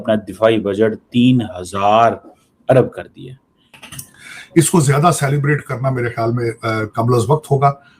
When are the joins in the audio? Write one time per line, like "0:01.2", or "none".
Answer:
0:04.0